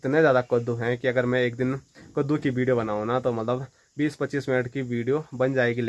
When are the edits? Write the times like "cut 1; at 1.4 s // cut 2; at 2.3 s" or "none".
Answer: none